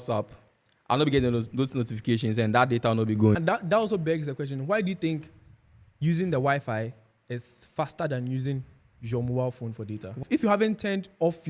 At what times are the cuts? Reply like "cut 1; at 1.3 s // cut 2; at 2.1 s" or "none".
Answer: cut 1; at 3.4 s // cut 2; at 10.2 s